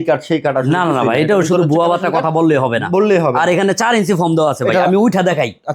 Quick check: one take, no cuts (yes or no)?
yes